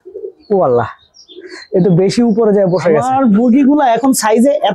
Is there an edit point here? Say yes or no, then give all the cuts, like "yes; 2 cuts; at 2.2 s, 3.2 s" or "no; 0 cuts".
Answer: yes; 1 cut; at 3.0 s